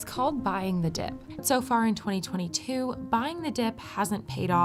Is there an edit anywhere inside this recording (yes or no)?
no